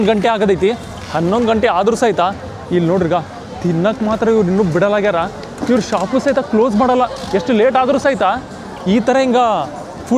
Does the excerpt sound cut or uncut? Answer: uncut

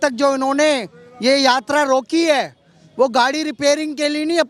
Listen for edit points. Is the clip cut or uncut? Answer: uncut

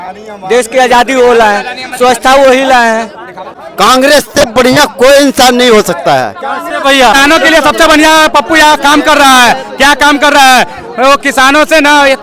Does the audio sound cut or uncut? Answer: cut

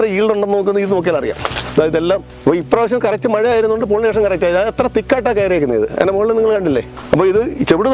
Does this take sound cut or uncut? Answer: uncut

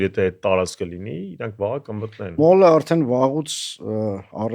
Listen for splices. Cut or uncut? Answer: cut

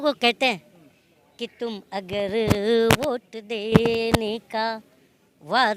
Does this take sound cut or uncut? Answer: uncut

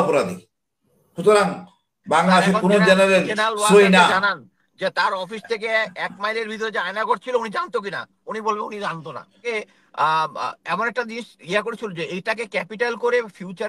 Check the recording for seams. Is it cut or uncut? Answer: cut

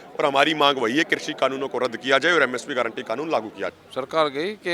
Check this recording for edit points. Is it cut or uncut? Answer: cut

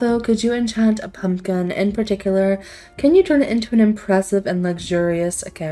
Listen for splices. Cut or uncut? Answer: uncut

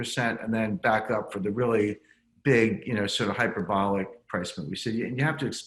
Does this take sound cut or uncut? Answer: uncut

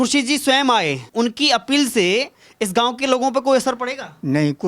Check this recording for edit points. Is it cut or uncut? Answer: cut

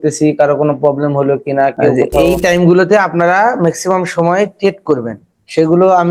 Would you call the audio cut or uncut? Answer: cut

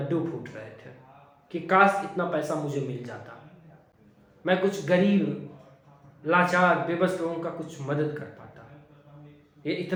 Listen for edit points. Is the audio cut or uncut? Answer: uncut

